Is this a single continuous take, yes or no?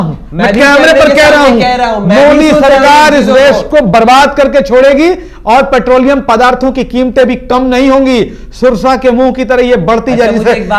yes